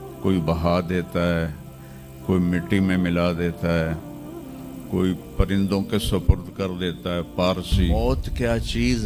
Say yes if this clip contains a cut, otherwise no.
yes